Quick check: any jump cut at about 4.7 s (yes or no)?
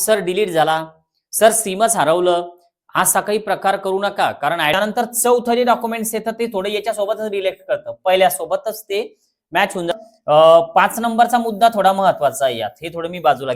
yes